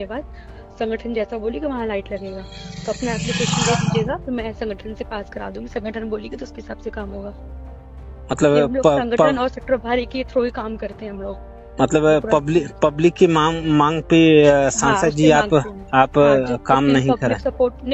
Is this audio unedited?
yes; 0 cuts

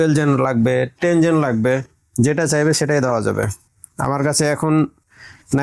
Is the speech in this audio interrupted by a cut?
no; 0 cuts

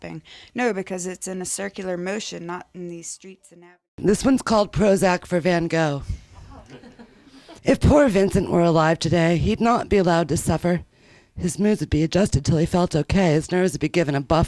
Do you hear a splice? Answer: yes; 2 cuts; at 3.5 s, 7.4 s

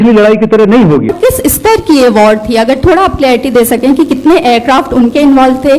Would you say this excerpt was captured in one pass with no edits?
no; 1 cut; at 1.1 s

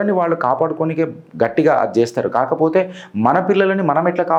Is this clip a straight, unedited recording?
yes; 0 cuts

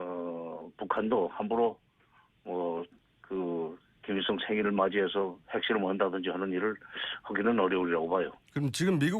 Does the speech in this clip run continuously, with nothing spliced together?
yes; 0 cuts

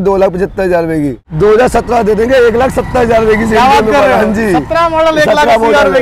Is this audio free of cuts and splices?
no; 1 cut; at 1.2 s

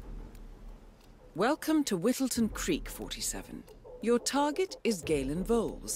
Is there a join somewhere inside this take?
yes; 1 cut; at 1.4 s

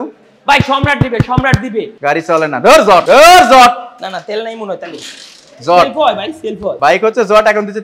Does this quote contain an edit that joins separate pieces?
yes; 3 cuts; at 1.9 s, 3.0 s, 6.8 s

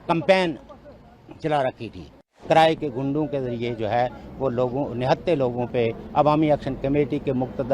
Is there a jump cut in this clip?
yes; 1 cut; at 2.3 s

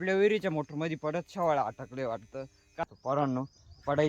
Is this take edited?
yes; 1 cut; at 2.8 s

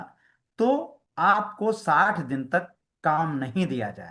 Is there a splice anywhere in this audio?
no; 0 cuts

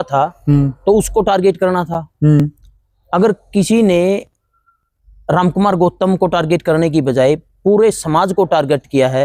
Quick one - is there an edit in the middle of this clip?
no; 0 cuts

